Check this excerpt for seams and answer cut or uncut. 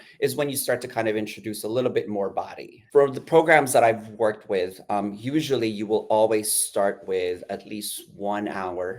cut